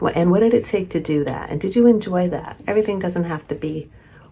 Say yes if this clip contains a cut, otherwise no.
yes